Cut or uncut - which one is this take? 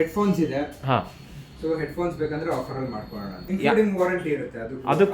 cut